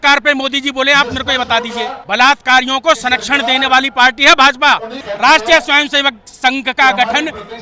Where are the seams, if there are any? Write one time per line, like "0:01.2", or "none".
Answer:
0:02.0
0:05.0